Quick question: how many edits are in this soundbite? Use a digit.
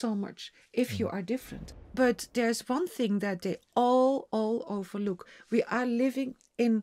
1